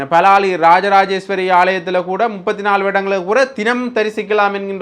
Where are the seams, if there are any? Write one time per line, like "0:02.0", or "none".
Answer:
none